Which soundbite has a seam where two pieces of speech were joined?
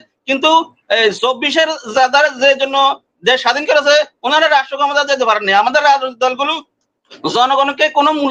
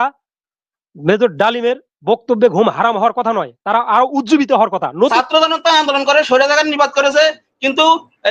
second; 1 cut; at 5.1 s

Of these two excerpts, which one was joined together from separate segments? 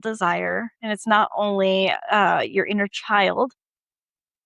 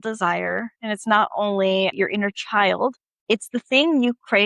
second; 2 cuts; at 1.9 s, 3.1 s

